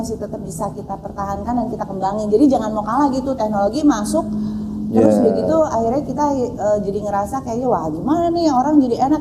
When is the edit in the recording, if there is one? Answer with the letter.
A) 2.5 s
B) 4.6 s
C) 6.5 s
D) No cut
D